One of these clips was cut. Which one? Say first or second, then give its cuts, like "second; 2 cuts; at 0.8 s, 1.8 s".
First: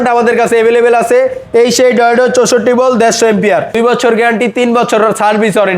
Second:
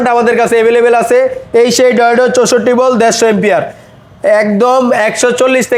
first; 1 cut; at 3.7 s